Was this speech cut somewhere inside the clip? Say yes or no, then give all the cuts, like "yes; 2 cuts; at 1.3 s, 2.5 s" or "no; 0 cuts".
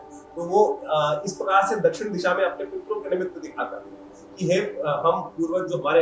no; 0 cuts